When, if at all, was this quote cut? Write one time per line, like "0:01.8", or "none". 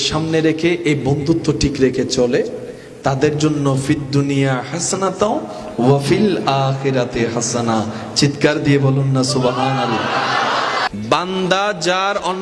0:10.9

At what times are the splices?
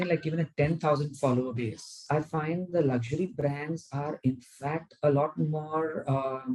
0:02.0

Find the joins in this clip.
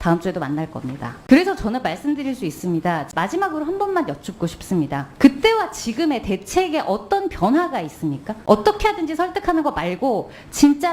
0:01.1
0:03.1
0:05.0
0:08.3

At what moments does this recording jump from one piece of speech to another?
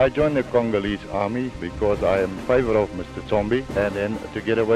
0:01.6
0:03.7

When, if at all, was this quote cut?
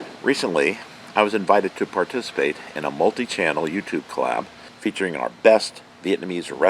0:04.6

